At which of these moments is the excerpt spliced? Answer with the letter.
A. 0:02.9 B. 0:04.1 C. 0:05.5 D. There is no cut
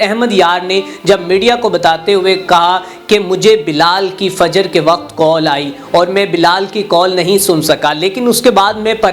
D